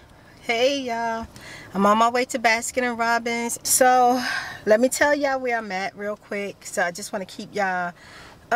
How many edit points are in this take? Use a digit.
1